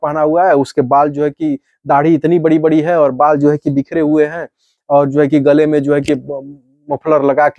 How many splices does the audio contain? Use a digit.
0